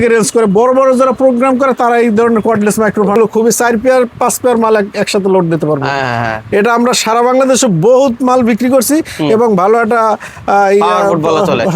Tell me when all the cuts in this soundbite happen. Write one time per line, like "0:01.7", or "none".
0:03.1